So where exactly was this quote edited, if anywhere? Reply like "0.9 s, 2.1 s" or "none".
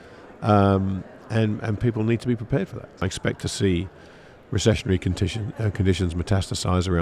3.0 s